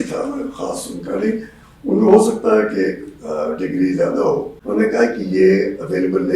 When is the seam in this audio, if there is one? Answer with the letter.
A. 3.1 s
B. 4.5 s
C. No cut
B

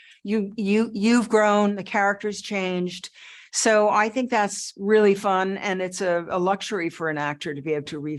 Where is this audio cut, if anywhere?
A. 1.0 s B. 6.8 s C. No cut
C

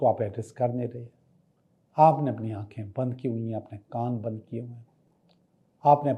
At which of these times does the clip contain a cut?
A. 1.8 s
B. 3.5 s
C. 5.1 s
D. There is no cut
D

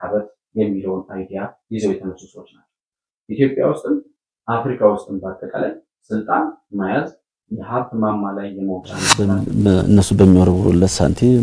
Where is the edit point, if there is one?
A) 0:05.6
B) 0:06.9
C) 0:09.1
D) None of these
C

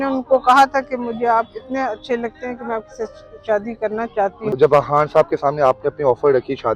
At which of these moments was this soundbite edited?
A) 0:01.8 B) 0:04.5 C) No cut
B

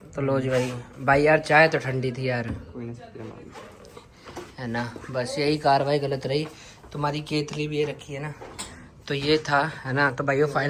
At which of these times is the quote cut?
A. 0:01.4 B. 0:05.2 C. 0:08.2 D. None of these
D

